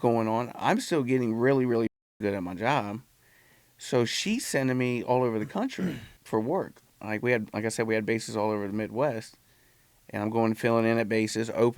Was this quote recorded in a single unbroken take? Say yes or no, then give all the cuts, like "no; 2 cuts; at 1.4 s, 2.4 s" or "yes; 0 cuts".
no; 2 cuts; at 6.1 s, 6.9 s